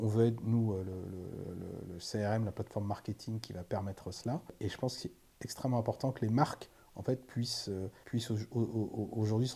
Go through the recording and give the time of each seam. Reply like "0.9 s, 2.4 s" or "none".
4.5 s, 8.0 s